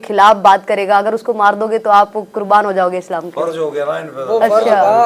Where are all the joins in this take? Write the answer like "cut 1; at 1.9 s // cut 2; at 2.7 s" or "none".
none